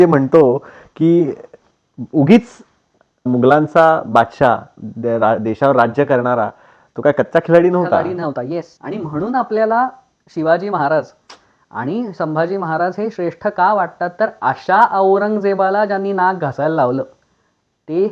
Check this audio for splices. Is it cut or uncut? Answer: uncut